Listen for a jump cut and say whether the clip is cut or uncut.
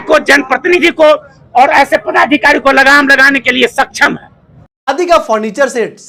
uncut